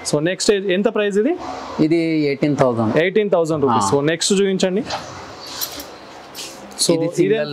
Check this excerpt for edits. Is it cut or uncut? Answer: uncut